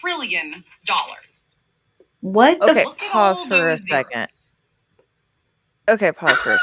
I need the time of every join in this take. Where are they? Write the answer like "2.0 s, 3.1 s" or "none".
none